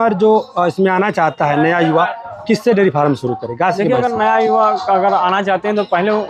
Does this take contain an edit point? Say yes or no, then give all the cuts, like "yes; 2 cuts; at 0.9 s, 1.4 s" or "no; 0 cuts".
no; 0 cuts